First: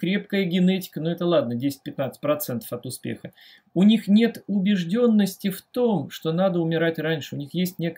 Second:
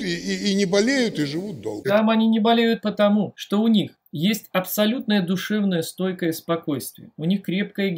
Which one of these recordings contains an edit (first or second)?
second